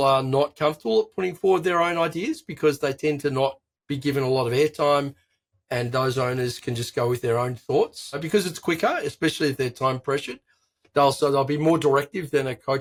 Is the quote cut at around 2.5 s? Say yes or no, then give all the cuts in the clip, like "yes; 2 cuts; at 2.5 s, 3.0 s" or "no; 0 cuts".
no; 0 cuts